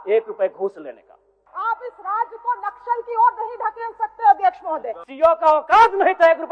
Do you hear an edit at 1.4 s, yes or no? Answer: yes